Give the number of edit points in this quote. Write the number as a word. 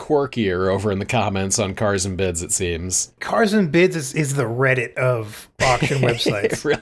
two